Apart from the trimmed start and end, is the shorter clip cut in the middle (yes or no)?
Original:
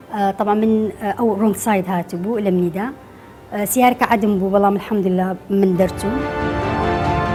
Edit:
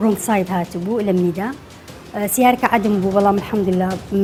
no